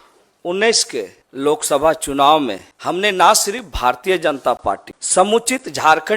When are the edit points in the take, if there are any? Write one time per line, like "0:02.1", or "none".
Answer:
0:01.2
0:02.7
0:04.9